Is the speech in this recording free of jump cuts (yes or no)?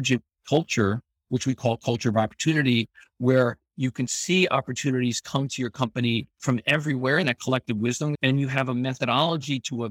no